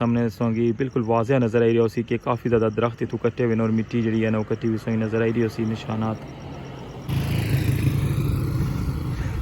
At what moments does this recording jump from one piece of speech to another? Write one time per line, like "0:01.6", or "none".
0:07.0